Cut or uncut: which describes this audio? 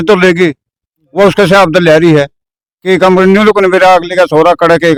uncut